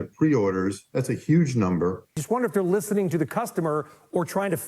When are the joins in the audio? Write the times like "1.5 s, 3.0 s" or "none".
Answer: 2.1 s